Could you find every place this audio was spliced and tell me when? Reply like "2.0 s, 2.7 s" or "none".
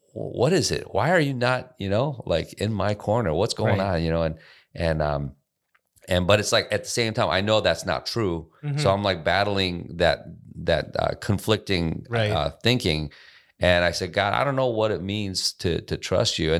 none